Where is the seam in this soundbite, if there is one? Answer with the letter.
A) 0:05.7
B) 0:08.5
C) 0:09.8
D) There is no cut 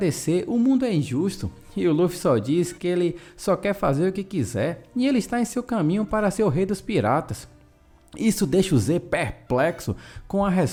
D